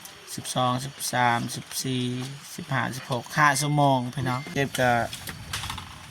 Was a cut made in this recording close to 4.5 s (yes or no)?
yes